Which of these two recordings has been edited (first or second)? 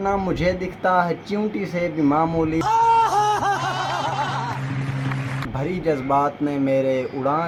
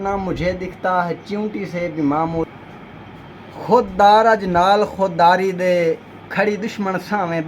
second